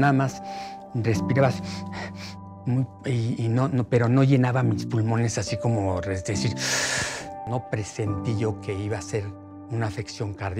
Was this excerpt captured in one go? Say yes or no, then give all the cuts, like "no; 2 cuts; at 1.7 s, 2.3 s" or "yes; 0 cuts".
no; 1 cut; at 7.3 s